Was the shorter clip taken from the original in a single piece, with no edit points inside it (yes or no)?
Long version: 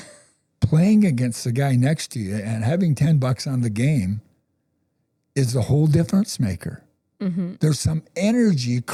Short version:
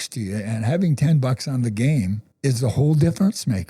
no